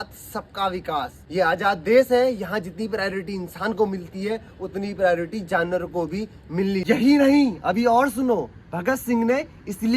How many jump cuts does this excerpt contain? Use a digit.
2